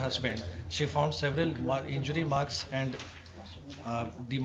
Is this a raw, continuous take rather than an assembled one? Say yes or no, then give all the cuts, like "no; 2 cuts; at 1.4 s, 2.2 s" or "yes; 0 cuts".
yes; 0 cuts